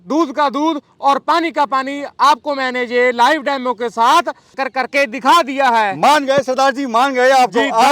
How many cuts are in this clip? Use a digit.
1